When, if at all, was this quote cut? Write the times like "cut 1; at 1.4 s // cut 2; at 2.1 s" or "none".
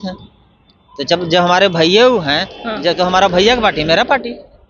none